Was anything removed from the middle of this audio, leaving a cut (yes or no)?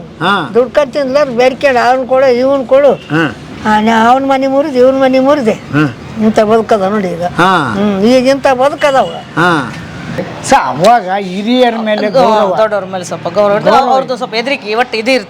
yes